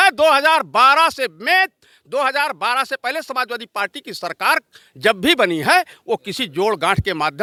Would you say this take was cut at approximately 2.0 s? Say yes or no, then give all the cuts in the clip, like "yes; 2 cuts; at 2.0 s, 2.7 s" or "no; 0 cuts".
no; 0 cuts